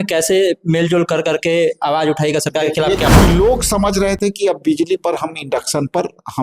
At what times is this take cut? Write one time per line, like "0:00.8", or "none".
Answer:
0:03.1